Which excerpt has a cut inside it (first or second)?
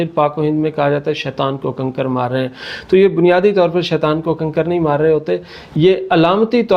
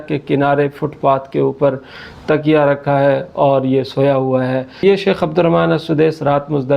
second